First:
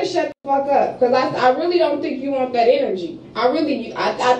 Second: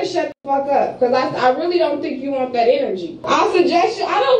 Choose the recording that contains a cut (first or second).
second